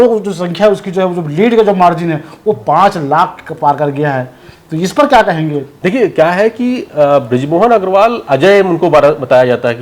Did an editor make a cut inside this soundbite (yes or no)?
no